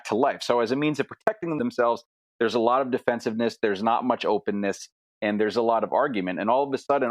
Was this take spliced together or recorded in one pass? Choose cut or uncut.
cut